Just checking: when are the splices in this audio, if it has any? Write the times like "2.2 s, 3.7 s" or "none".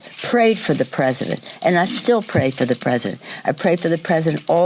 1.4 s